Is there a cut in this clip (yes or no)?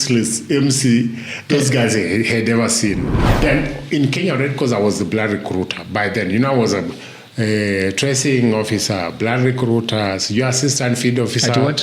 yes